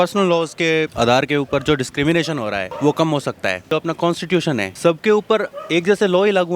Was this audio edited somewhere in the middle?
yes; 5 cuts; at 0.9 s, 2.7 s, 3.7 s, 4.7 s, 5.6 s

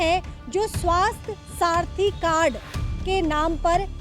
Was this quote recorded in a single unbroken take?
yes; 0 cuts

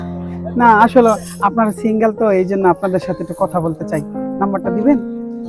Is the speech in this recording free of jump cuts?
yes; 0 cuts

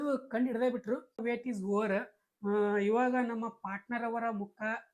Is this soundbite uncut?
no; 1 cut; at 1.2 s

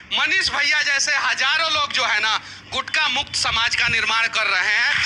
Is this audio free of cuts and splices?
yes; 0 cuts

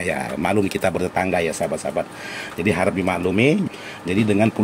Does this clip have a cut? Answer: yes; 1 cut; at 3.6 s

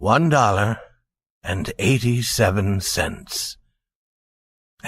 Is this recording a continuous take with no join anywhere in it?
no; 1 cut; at 1.7 s

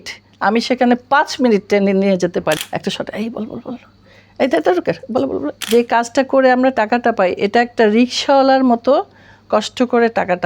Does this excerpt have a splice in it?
yes; 2 cuts; at 2.6 s, 5.5 s

